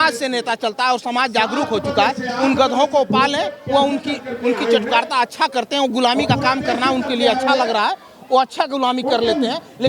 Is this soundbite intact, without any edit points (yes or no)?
yes